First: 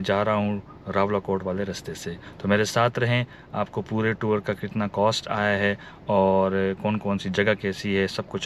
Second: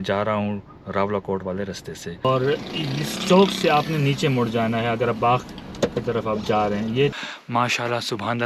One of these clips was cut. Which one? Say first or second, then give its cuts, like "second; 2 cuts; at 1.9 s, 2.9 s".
second; 2 cuts; at 2.2 s, 7.1 s